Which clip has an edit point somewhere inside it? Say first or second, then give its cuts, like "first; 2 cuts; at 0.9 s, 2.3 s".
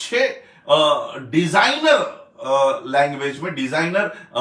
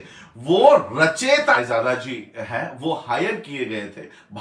second; 1 cut; at 1.6 s